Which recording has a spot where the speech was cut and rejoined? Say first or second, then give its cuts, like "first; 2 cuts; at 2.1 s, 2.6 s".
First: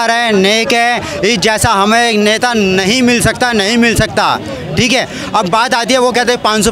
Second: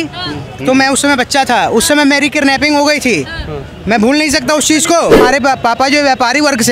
second; 1 cut; at 5.2 s